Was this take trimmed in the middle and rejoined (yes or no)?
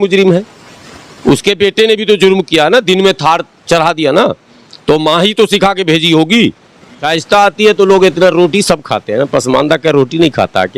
yes